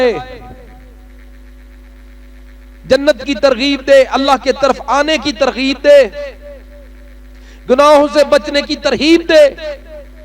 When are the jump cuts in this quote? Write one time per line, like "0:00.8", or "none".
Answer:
none